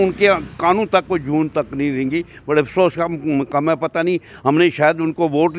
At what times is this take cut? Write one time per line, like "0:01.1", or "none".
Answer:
none